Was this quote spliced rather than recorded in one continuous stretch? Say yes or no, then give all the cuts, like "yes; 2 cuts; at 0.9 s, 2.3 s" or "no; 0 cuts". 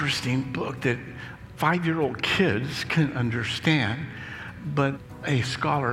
yes; 2 cuts; at 1.5 s, 5.1 s